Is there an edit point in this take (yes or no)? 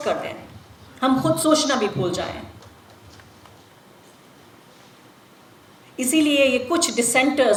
no